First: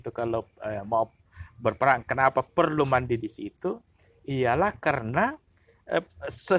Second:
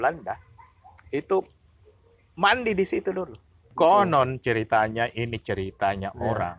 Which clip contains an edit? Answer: second; 1 cut; at 3.7 s

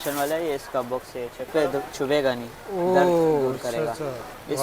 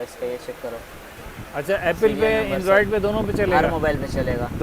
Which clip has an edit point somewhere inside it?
first; 1 cut; at 1.5 s

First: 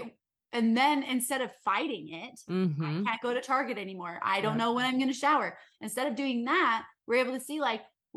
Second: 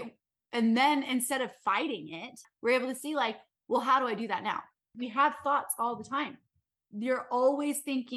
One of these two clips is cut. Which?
second; 2 cuts; at 2.4 s, 4.9 s

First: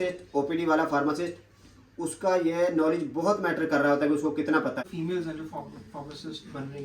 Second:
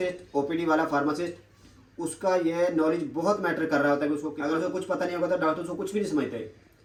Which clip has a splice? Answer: first; 1 cut; at 4.5 s

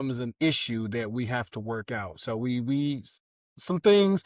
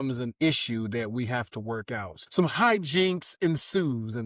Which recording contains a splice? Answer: second; 1 cut; at 2.2 s

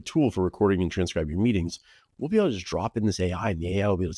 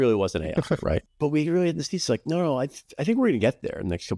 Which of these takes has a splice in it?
second; 1 cut; at 1.0 s

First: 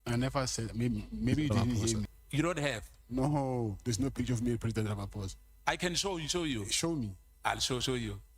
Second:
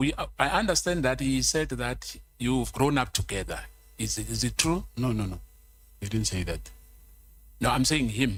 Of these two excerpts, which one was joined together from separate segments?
first; 1 cut; at 2.2 s

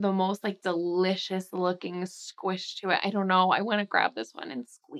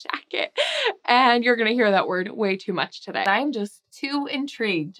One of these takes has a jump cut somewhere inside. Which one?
second; 1 cut; at 3.2 s

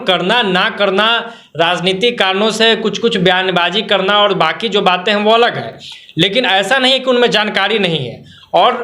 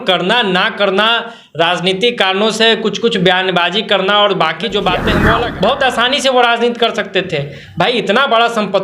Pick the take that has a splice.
second; 1 cut; at 5.4 s

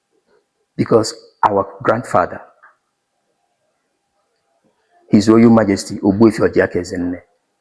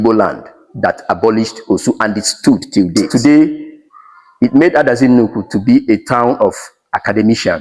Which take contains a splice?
second; 1 cut; at 3.1 s

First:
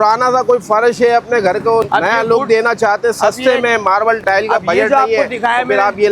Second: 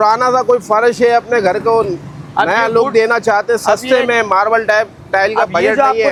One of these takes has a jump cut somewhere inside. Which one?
first; 2 cuts; at 1.9 s, 4.2 s

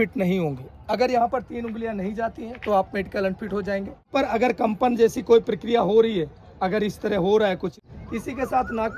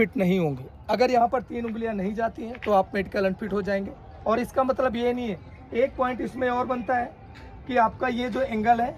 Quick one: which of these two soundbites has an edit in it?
first; 2 cuts; at 4.1 s, 7.8 s

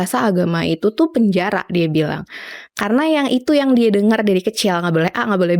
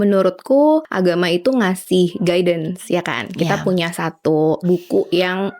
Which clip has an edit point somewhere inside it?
second; 2 cuts; at 0.9 s, 4.6 s

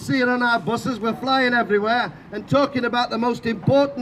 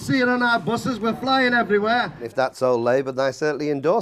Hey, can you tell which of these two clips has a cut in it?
second; 1 cut; at 2.2 s

